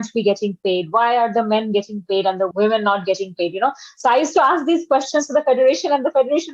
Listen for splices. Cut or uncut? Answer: cut